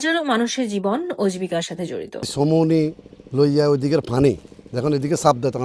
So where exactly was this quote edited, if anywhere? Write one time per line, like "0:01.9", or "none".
none